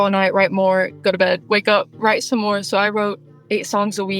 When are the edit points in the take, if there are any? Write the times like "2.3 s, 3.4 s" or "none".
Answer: 3.3 s